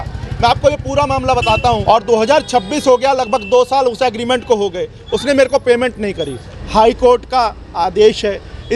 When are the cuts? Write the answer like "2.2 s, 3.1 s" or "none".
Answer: 1.8 s, 6.5 s